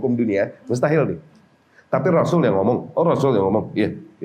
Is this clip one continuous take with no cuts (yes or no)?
yes